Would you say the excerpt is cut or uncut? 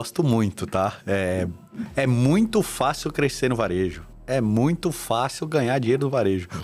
uncut